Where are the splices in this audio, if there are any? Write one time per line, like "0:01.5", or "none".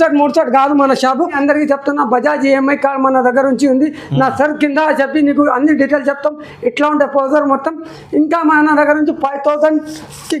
0:01.4